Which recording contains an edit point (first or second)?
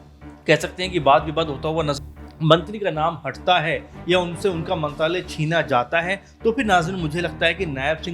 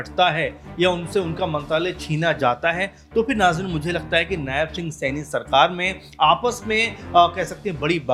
first